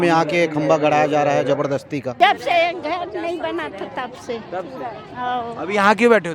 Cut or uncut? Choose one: cut